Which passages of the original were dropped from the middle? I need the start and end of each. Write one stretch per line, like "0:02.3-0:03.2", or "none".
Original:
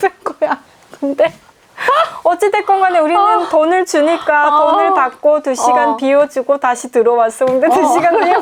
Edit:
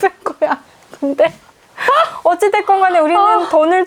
none